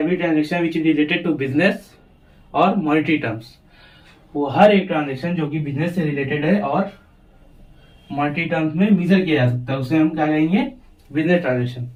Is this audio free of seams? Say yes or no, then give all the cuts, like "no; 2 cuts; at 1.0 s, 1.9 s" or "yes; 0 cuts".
yes; 0 cuts